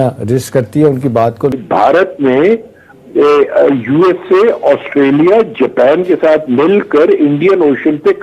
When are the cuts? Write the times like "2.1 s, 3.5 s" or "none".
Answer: 1.6 s